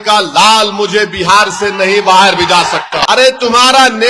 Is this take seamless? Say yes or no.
no